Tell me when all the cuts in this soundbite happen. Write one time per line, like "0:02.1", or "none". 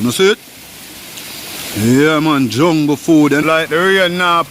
0:03.4